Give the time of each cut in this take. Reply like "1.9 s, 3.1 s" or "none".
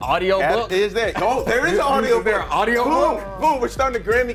none